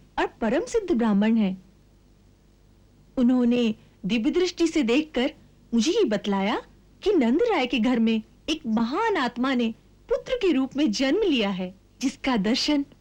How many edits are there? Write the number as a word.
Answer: zero